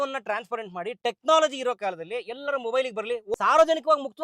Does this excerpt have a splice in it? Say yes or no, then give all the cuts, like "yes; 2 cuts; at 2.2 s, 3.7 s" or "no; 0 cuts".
yes; 1 cut; at 3.3 s